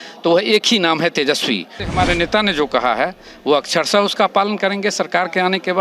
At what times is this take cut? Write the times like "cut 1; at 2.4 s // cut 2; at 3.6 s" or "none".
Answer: cut 1; at 1.8 s

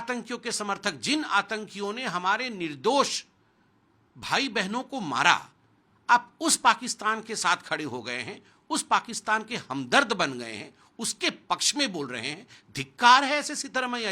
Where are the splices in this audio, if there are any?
none

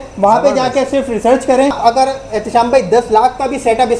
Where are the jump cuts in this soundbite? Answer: cut 1; at 1.8 s

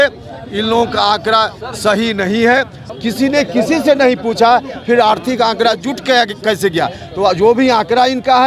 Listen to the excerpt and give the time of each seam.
cut 1; at 2.8 s

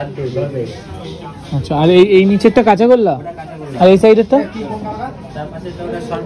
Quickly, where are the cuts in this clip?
none

